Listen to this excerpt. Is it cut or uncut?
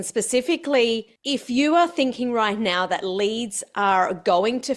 cut